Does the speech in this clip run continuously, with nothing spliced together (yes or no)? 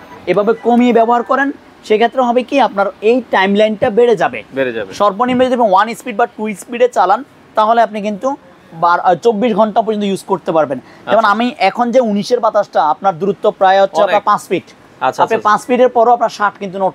yes